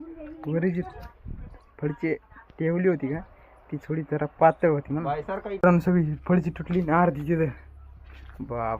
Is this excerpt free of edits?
no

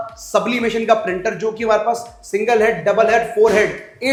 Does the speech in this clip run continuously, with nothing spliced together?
yes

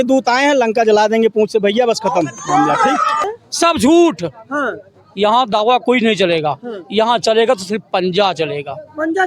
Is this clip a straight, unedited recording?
no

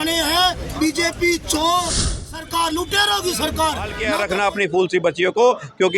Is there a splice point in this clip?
yes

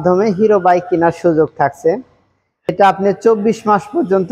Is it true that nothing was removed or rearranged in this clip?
no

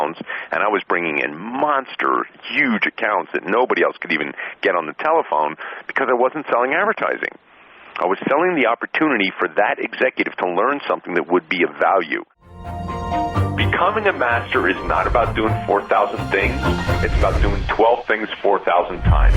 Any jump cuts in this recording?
yes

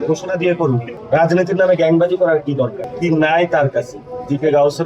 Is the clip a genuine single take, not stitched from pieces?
no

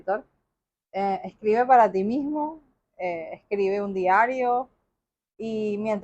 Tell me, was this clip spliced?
no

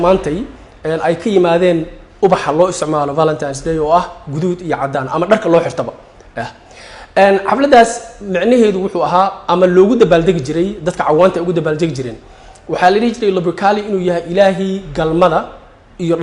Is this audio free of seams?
yes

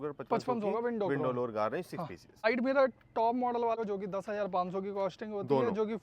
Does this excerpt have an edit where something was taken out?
yes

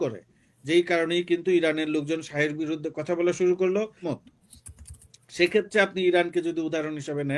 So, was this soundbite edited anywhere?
yes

